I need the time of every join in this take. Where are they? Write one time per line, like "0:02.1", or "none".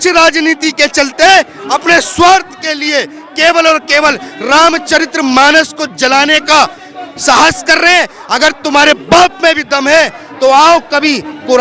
none